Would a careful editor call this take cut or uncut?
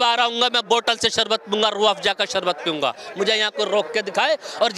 uncut